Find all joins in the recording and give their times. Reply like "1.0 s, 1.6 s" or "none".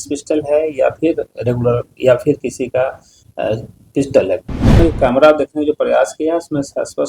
4.8 s